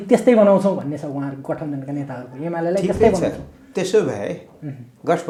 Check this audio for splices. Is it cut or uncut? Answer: uncut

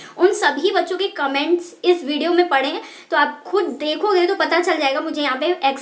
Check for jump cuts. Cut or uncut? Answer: uncut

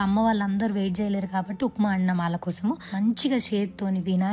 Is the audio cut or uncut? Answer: cut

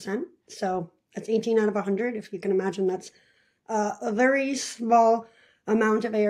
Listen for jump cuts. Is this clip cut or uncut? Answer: uncut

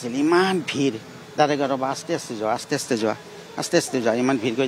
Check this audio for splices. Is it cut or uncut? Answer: uncut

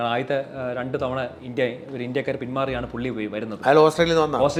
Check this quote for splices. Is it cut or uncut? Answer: uncut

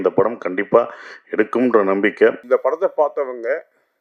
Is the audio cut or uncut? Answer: cut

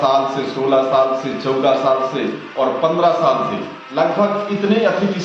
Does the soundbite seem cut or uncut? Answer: uncut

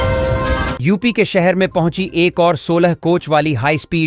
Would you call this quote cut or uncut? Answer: uncut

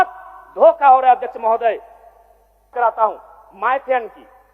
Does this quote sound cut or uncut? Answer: cut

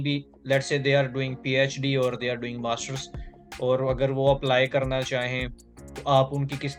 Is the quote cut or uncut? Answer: uncut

